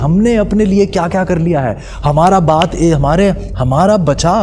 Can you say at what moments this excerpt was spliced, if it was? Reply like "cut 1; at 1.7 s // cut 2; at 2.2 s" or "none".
none